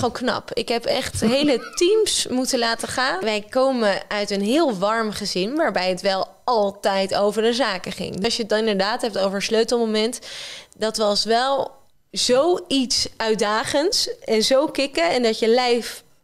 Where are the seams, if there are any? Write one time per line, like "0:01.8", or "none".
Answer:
0:03.2
0:08.2